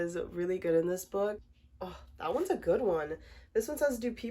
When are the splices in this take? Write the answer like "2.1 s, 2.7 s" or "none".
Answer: 1.4 s